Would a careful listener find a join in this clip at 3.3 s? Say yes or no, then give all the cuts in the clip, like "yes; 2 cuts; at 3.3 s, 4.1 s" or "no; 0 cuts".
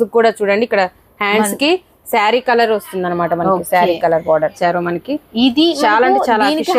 no; 1 cut; at 4.5 s